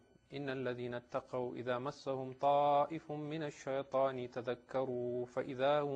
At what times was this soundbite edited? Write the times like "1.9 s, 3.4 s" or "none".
3.0 s

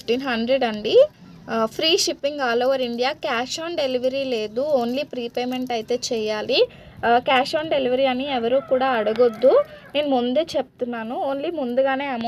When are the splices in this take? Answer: none

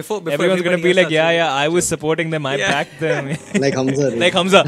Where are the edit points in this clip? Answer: none

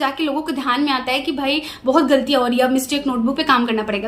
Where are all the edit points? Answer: none

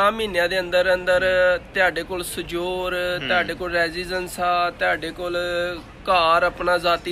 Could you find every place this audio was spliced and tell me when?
none

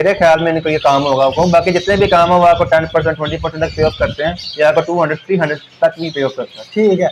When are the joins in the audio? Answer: none

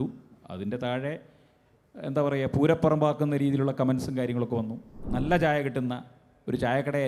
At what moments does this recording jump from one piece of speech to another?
5.0 s

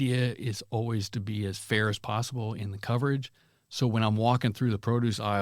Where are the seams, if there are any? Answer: none

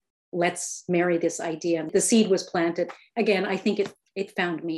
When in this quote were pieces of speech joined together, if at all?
1.9 s

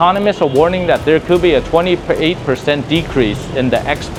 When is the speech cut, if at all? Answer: none

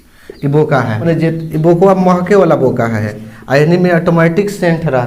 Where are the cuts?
1.0 s, 3.1 s

